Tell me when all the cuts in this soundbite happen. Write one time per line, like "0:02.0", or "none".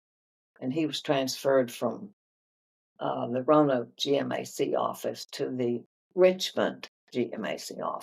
none